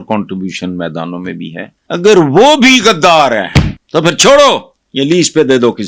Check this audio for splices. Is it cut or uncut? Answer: cut